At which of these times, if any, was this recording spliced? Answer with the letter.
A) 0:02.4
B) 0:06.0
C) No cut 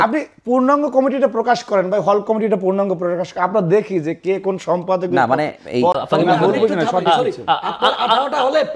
B